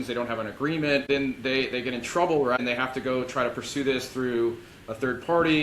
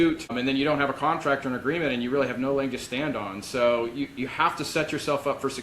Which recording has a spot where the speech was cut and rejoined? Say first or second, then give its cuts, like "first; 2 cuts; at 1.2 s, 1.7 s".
first; 2 cuts; at 1.0 s, 2.6 s